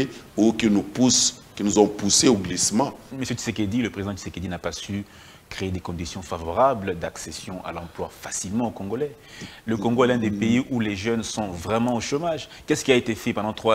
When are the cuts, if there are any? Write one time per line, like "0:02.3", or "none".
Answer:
0:03.1